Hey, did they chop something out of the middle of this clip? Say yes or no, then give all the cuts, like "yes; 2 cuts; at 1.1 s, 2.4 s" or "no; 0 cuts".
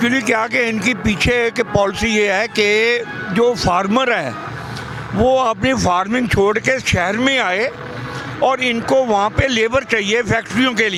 no; 0 cuts